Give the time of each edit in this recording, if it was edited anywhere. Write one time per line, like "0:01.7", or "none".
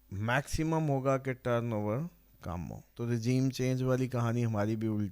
0:02.9